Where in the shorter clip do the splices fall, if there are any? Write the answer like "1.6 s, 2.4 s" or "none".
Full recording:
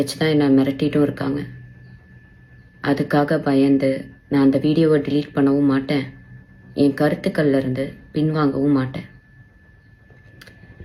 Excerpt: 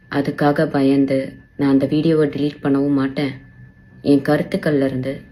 none